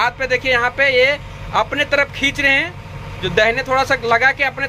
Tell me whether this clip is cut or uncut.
uncut